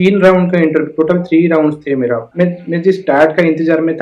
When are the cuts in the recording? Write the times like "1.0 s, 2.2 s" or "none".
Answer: 2.3 s